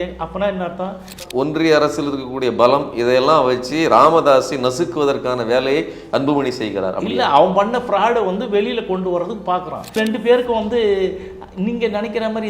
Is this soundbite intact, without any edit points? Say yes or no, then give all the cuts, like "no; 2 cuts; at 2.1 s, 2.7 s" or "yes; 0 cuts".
no; 2 cuts; at 1.2 s, 9.9 s